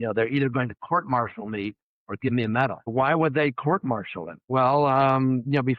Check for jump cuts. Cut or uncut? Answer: cut